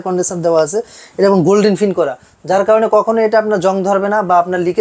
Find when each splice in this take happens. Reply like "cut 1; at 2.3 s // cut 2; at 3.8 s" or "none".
none